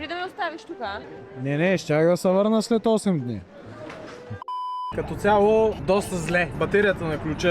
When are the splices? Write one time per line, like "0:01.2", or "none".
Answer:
0:04.9
0:05.8